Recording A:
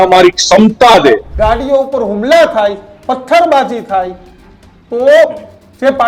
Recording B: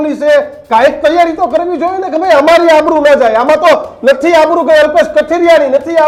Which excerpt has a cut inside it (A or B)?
A